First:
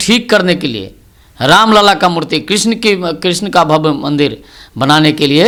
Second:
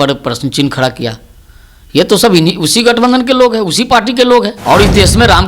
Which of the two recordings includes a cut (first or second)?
second